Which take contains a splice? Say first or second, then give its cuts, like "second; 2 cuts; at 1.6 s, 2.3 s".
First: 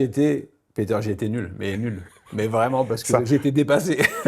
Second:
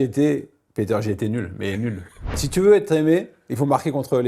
second; 1 cut; at 2.3 s